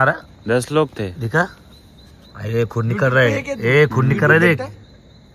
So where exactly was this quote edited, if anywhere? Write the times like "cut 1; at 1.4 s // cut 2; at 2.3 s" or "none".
none